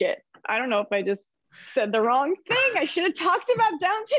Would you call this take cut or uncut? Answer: uncut